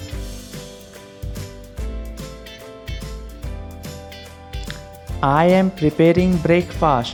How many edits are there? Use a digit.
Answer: 0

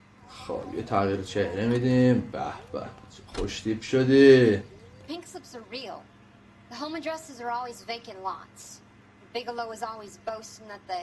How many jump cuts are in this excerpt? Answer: 1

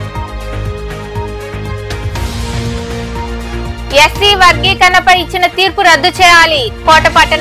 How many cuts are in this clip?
1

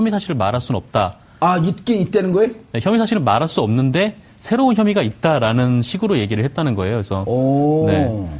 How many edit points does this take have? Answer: 1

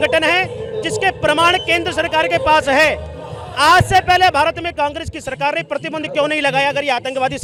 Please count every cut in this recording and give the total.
0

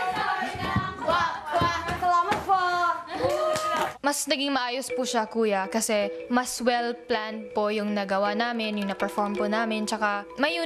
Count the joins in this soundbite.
1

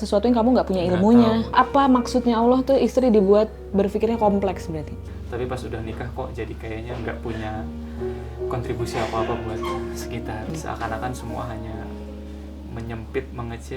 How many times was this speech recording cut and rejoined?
3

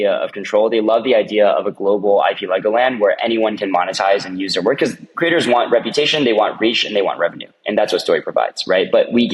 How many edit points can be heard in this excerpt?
0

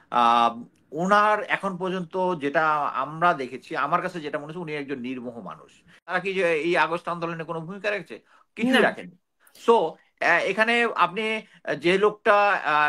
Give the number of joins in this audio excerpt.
1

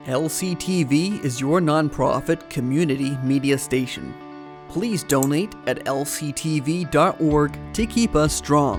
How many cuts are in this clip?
0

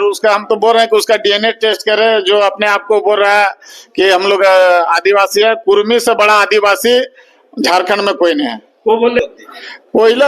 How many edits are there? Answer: 1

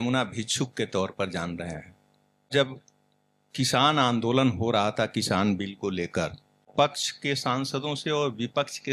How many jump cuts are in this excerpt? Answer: 2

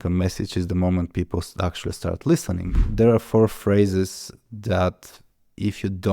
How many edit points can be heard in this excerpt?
1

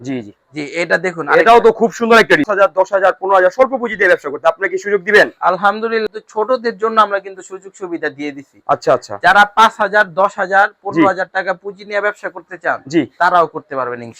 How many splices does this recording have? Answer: 2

